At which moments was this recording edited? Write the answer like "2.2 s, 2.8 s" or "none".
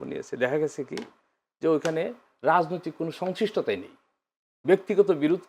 none